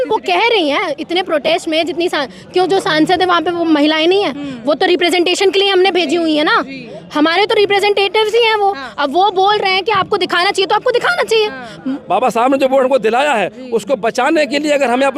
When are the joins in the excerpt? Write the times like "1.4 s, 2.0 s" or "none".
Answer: 11.8 s